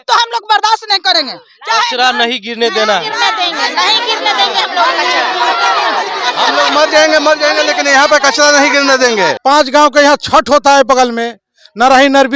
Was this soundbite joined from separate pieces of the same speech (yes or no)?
yes